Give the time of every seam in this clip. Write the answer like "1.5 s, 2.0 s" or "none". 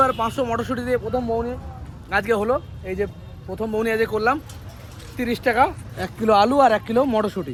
none